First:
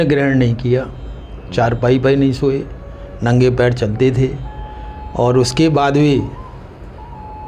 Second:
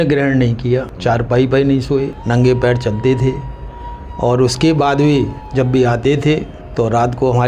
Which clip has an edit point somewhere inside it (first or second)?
second